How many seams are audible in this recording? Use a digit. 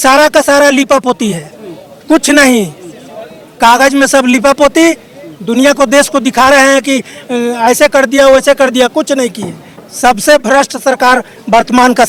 0